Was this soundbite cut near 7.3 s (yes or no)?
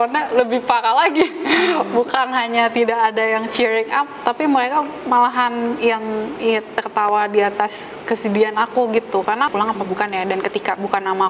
no